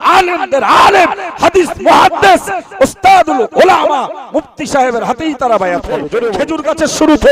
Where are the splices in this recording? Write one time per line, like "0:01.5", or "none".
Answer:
0:06.3